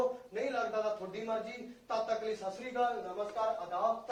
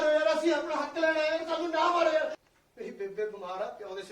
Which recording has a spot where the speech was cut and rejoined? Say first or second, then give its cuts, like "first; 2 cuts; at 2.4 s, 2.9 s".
second; 1 cut; at 2.4 s